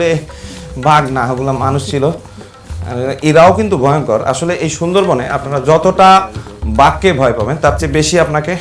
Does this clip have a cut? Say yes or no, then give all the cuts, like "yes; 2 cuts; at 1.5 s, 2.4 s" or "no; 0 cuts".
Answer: no; 0 cuts